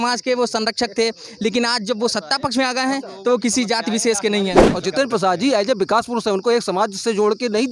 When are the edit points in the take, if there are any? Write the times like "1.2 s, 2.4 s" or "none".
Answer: 4.7 s